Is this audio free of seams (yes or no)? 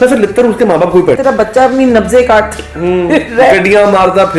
no